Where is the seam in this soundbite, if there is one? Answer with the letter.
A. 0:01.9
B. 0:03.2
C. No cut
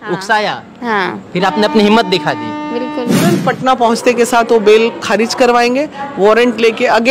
B